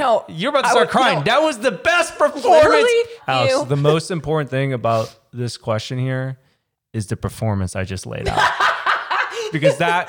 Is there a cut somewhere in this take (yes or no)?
yes